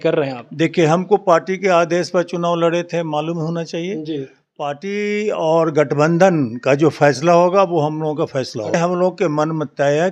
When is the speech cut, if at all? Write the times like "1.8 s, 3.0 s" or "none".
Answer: 8.7 s